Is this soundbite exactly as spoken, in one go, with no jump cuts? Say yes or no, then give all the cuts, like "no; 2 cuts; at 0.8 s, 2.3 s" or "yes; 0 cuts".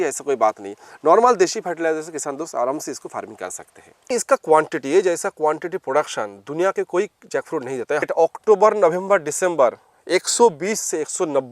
no; 2 cuts; at 4.1 s, 8.0 s